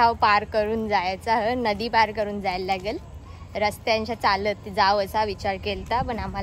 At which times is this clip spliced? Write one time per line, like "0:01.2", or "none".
none

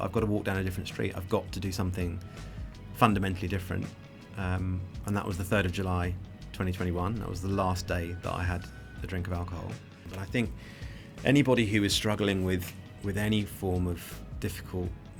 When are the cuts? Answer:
0:10.1

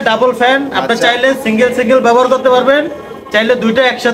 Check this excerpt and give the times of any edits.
none

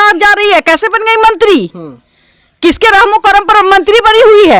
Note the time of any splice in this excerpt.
none

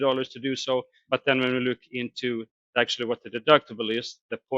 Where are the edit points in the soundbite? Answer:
0:01.0

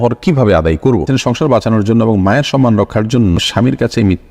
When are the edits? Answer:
0:01.0
0:03.4

